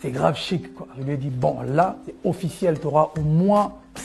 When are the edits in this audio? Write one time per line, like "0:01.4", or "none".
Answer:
0:00.9